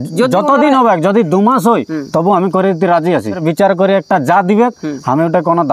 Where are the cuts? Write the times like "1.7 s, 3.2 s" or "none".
3.4 s